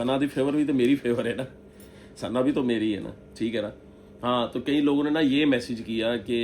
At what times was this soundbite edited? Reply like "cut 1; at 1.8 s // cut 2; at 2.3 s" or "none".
none